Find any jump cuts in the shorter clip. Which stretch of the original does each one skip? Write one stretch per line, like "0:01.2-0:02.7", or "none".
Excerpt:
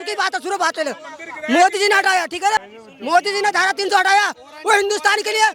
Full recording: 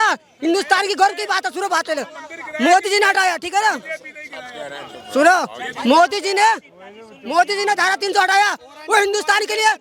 0:03.7-0:06.8